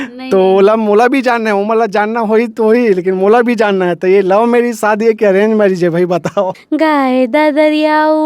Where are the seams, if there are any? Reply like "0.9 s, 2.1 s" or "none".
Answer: 6.6 s